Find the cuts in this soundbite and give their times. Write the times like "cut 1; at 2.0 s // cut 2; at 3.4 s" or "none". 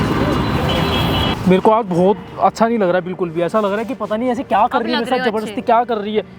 cut 1; at 1.3 s